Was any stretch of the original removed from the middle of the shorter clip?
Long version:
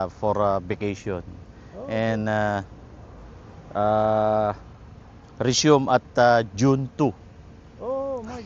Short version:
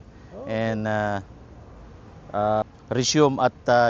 yes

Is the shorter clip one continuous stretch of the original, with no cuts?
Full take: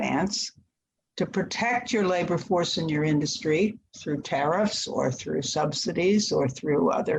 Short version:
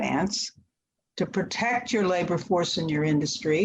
yes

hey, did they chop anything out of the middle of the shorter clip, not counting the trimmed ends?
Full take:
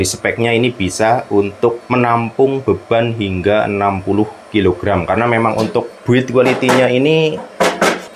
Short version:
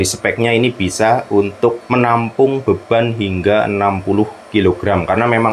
no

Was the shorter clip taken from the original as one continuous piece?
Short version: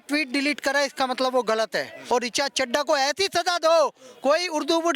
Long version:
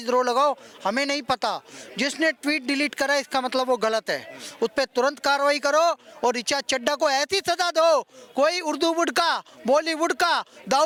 no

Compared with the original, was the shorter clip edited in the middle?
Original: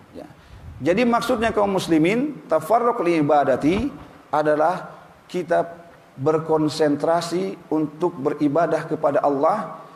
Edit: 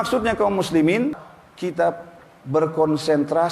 yes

